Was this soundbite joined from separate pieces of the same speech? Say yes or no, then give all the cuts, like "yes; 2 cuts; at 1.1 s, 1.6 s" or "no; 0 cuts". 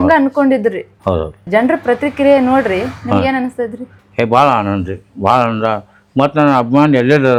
no; 0 cuts